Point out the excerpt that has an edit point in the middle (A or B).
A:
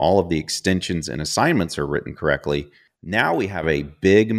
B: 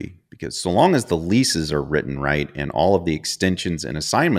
A